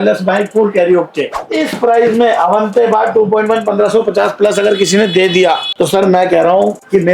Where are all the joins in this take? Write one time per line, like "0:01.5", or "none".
0:01.3
0:05.7